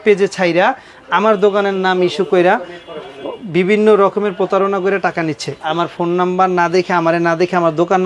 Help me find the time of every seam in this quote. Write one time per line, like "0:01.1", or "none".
0:05.6